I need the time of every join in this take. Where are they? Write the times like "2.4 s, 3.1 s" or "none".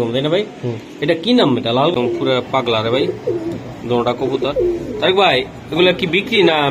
1.9 s